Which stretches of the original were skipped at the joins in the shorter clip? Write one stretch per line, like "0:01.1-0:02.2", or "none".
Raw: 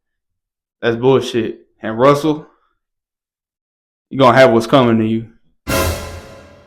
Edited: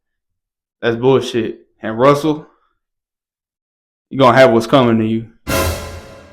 0:05.3-0:05.5